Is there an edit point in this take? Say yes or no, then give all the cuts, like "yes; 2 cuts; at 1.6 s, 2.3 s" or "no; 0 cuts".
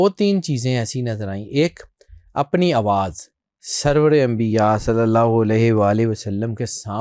no; 0 cuts